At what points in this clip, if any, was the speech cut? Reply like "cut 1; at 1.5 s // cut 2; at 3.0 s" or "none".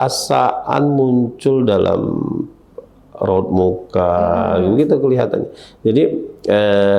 none